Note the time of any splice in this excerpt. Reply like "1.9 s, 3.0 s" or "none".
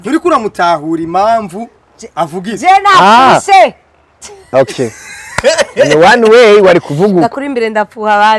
none